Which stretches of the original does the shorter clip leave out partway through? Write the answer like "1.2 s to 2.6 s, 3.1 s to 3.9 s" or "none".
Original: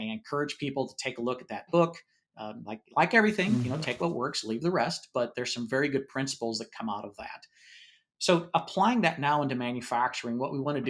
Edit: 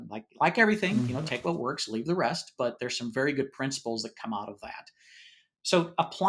none